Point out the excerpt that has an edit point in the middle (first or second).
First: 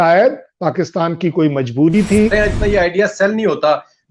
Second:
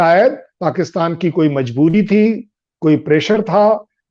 first